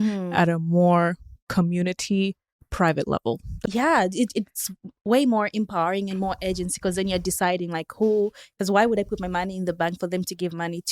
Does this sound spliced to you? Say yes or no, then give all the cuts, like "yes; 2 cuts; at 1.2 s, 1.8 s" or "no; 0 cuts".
yes; 1 cut; at 3.5 s